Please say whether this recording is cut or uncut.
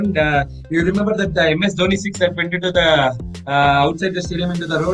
uncut